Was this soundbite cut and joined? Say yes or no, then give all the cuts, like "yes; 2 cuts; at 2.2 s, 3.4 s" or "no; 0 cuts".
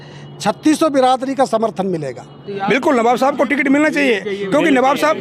yes; 1 cut; at 2.5 s